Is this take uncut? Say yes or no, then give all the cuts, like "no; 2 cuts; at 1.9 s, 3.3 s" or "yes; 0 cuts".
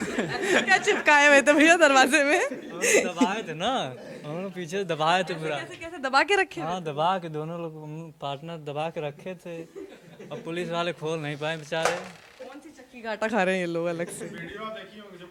yes; 0 cuts